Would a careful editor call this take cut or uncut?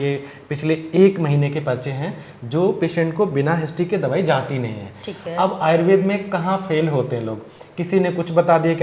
uncut